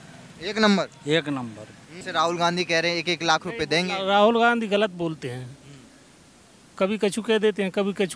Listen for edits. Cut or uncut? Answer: cut